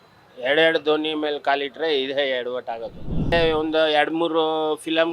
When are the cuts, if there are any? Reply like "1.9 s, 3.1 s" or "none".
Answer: 3.3 s

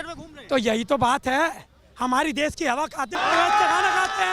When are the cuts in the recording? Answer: 3.2 s

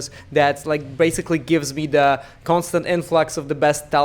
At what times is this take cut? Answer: none

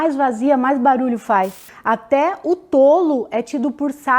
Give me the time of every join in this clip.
1.6 s

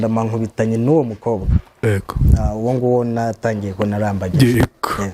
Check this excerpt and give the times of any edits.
none

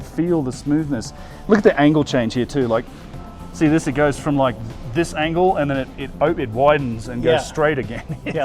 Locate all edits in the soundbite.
none

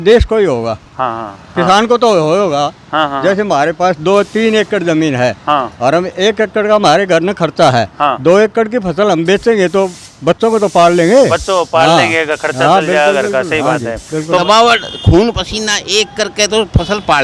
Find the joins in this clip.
14.4 s

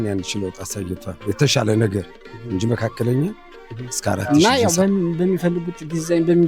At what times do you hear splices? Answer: 4.2 s

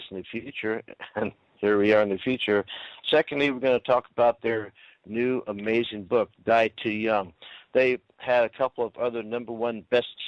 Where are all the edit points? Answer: 8.2 s

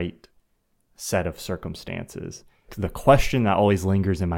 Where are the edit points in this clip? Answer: 2.7 s

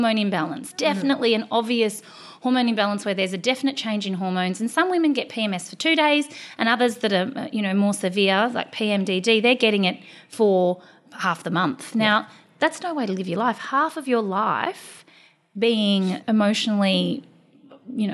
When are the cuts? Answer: 16.2 s

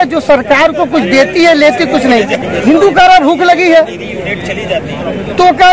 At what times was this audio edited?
2.4 s

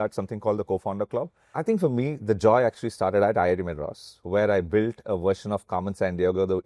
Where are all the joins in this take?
1.4 s

